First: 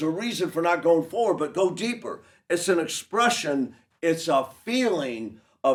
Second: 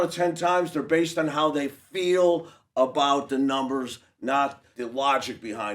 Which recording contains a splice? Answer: second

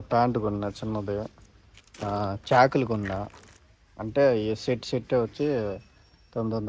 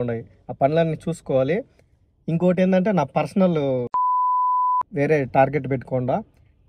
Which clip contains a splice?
second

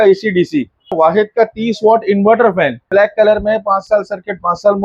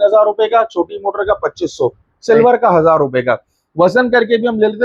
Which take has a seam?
first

